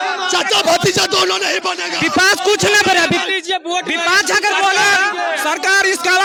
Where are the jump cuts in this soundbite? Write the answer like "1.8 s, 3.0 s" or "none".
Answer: none